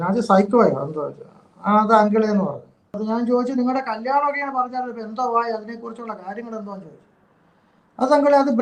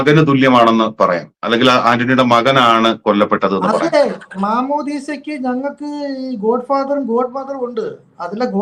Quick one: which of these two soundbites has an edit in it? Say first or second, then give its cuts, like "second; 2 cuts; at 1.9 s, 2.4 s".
first; 1 cut; at 3.0 s